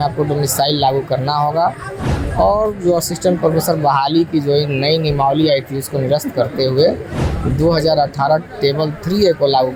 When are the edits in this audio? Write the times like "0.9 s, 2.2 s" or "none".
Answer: none